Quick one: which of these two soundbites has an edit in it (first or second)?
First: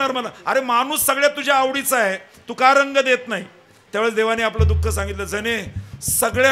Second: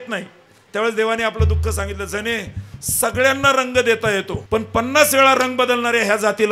second